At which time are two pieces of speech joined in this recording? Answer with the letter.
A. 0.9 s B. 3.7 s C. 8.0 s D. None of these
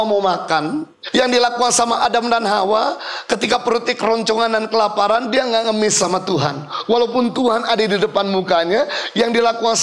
A